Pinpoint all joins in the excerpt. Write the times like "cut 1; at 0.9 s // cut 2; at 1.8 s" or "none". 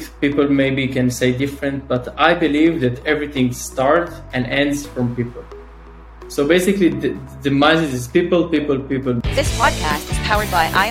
cut 1; at 9.2 s

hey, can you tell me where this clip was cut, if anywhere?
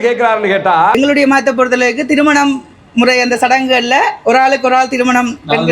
cut 1; at 0.9 s

